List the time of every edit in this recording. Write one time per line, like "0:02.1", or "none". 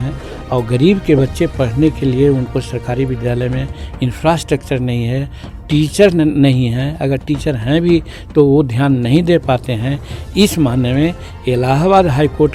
none

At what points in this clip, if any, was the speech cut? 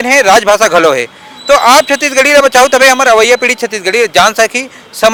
none

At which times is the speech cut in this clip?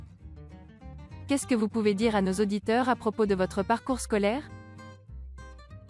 0:01.2
0:04.4

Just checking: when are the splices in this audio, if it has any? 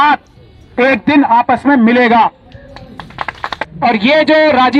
0:03.7

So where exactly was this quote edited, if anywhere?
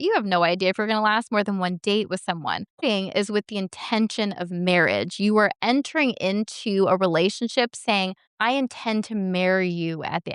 0:02.8
0:08.2

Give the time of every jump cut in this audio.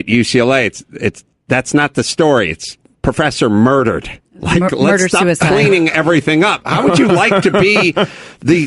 0:06.5

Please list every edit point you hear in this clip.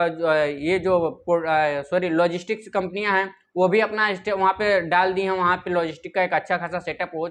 none

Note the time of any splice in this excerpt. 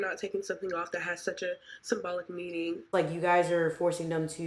0:02.9

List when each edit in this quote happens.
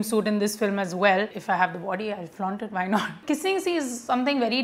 0:01.4
0:03.2

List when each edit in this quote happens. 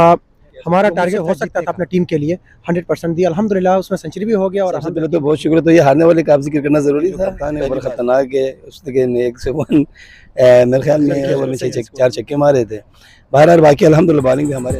0:01.3
0:04.9
0:07.4
0:11.4

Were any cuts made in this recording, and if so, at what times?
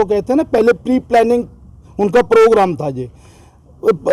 none

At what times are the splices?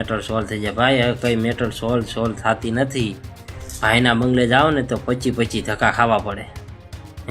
none

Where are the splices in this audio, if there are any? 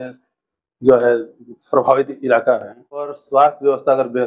0:03.2

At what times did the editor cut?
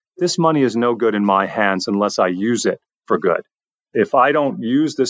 none

